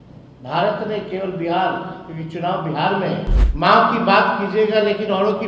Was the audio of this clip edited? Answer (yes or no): yes